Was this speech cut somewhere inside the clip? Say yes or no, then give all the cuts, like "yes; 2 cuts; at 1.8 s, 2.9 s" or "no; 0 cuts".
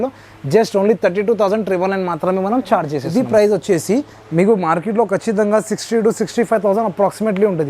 yes; 1 cut; at 3.0 s